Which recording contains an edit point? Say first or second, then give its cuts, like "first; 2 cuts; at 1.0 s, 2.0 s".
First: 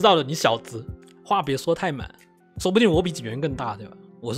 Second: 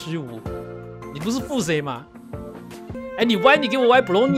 second; 1 cut; at 3.0 s